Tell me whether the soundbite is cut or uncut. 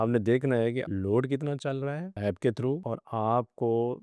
cut